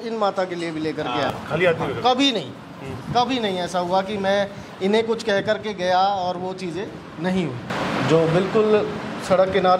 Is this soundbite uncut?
no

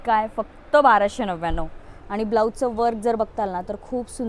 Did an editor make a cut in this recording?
no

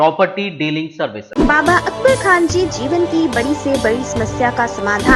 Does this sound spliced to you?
yes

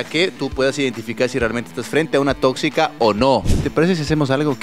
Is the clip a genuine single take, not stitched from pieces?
no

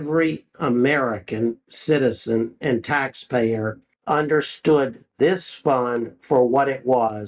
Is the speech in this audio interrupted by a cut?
no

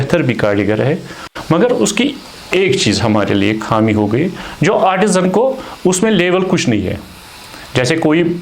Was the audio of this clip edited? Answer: yes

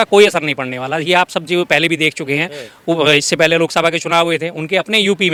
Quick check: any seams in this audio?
no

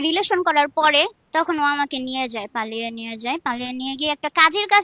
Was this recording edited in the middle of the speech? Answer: yes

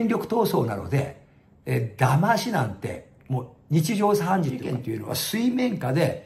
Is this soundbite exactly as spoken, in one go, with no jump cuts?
no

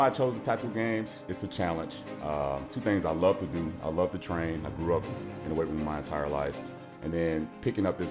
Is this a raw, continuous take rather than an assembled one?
no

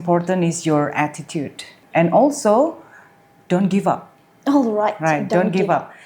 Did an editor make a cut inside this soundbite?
yes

